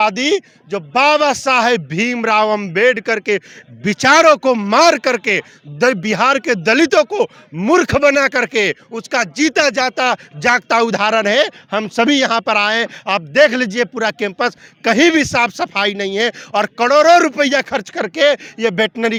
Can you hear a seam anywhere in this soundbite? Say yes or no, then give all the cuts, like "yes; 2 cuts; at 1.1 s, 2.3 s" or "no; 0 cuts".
no; 0 cuts